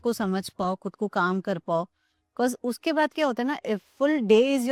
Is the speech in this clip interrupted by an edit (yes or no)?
no